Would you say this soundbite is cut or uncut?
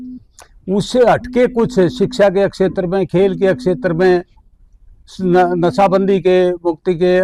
uncut